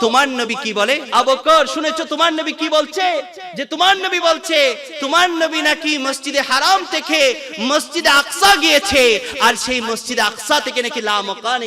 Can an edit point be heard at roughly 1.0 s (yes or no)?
yes